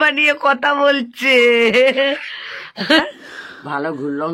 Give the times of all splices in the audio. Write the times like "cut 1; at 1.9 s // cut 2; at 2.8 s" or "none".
cut 1; at 3.0 s

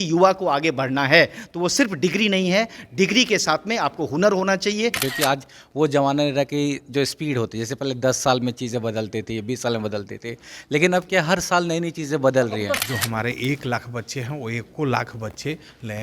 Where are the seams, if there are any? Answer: cut 1; at 5.0 s // cut 2; at 12.8 s

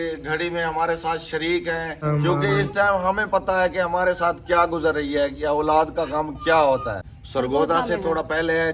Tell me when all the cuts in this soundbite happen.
cut 1; at 2.0 s // cut 2; at 7.1 s

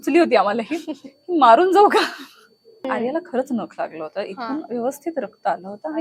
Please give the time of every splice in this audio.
cut 1; at 2.9 s

